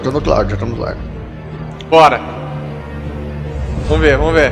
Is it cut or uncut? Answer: uncut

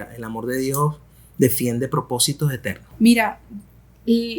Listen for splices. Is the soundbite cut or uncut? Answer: cut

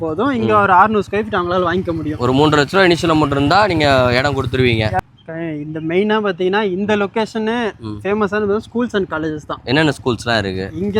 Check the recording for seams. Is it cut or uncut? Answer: cut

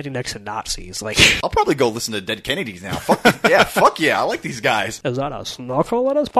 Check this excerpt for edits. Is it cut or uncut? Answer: cut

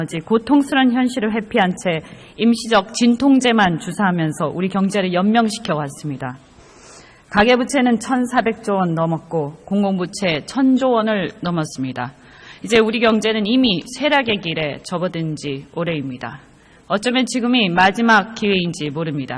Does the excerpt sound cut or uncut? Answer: cut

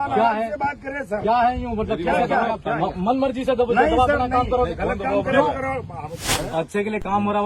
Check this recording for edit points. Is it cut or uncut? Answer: cut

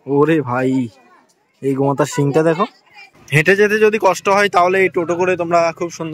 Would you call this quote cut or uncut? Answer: cut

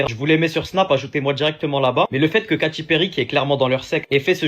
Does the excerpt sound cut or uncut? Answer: uncut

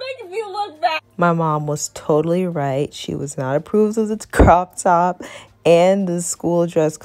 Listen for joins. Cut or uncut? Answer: cut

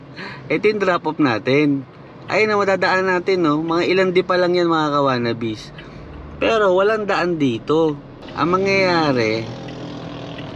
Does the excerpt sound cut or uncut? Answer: uncut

